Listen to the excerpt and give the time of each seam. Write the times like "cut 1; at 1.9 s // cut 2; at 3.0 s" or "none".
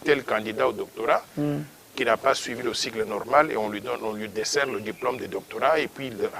none